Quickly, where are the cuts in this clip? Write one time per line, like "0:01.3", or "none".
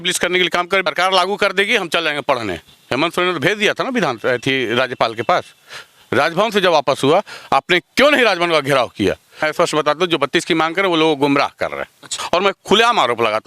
0:00.9
0:09.5
0:12.2